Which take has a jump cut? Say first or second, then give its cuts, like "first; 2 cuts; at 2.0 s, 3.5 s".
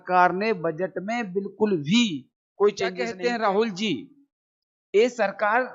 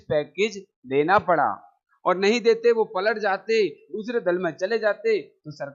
first; 1 cut; at 3.1 s